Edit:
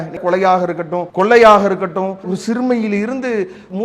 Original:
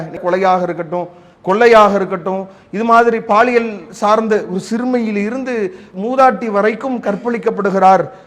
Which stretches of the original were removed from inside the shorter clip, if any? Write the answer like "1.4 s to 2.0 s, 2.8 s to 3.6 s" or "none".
1.0 s to 1.3 s, 2.6 s to 4.5 s